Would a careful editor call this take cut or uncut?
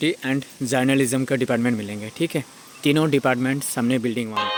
uncut